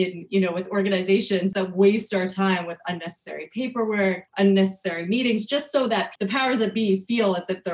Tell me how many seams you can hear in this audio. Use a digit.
3